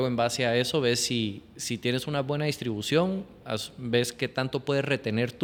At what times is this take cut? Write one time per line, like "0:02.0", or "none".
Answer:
none